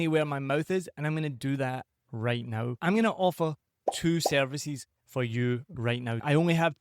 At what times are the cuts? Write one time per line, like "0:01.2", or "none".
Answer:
0:02.8